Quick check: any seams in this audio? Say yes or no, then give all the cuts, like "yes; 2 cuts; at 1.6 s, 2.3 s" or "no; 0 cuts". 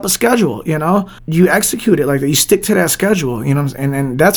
yes; 1 cut; at 1.2 s